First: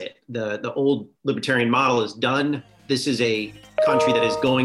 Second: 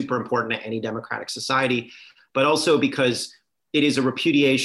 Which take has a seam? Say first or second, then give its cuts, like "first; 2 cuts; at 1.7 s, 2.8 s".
first; 2 cuts; at 1.1 s, 2.7 s